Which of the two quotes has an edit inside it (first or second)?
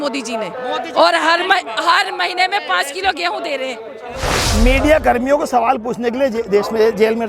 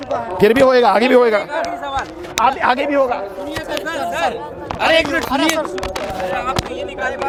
first